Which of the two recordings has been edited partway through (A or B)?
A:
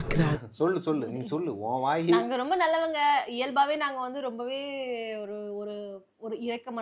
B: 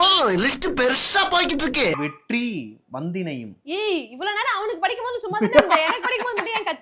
B